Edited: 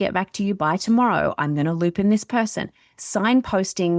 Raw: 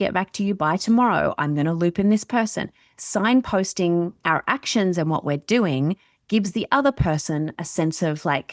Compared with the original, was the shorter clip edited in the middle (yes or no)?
no